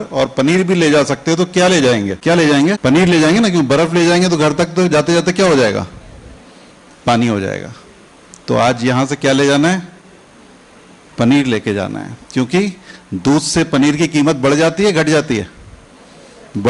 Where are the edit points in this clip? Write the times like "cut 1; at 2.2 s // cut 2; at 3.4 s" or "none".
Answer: cut 1; at 2.2 s // cut 2; at 2.8 s